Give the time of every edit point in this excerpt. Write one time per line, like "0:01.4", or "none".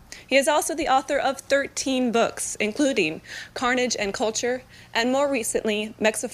0:04.6